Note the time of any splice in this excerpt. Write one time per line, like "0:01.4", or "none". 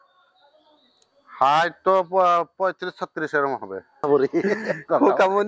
0:04.0